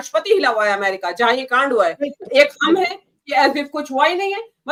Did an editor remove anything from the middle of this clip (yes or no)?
no